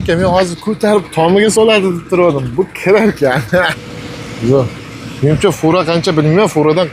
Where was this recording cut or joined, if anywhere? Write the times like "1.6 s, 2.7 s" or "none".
3.8 s